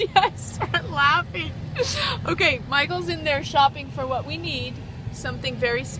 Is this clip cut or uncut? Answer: cut